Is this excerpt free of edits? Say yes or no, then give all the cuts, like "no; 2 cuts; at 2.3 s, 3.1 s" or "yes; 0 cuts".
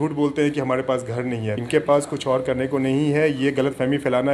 no; 1 cut; at 1.6 s